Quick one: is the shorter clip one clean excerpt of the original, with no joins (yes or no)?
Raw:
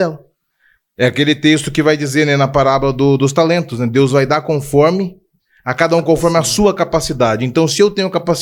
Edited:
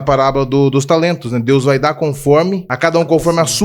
no